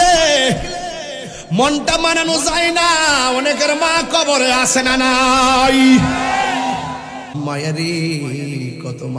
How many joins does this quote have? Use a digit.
1